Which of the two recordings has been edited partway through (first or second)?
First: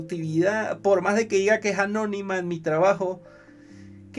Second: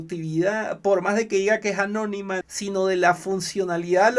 second